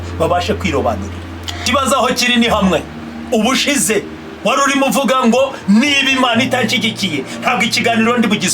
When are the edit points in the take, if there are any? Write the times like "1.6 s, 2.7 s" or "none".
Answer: 1.6 s